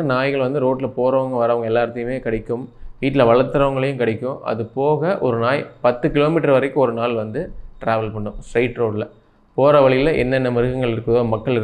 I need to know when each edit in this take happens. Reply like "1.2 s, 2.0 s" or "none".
none

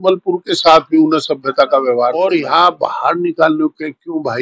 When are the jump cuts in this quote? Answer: 2.2 s

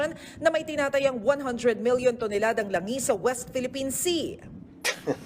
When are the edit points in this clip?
2.7 s

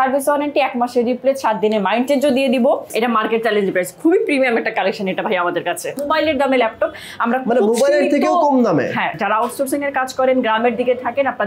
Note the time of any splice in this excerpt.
2.9 s, 6.0 s, 9.2 s

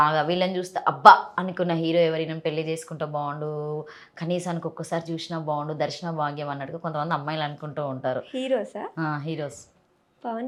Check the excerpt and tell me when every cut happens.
none

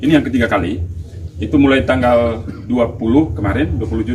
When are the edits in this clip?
none

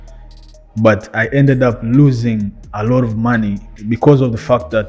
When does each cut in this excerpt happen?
3.7 s

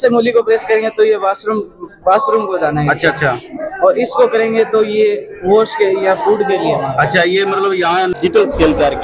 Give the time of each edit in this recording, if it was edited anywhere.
8.1 s

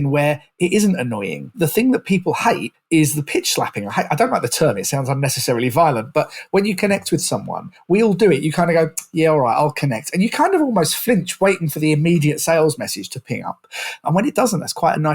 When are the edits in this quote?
1.5 s, 2.7 s

